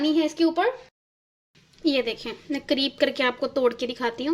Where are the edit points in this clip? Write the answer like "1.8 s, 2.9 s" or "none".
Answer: 1.0 s